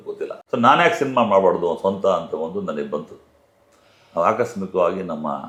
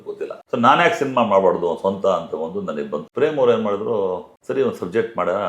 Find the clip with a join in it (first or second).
second